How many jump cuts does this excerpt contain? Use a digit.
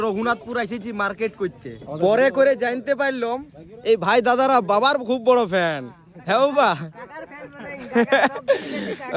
1